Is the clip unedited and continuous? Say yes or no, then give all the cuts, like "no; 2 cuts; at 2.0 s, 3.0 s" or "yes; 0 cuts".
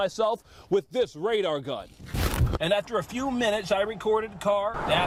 yes; 0 cuts